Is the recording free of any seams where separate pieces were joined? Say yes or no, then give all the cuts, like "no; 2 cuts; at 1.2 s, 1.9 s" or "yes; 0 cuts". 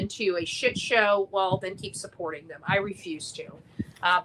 no; 1 cut; at 2.6 s